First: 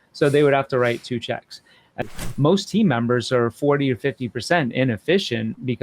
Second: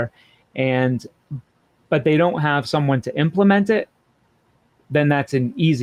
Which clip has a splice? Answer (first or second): first